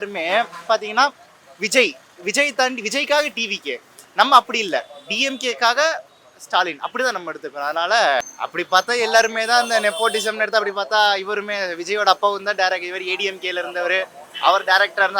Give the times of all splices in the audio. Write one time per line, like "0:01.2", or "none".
0:08.3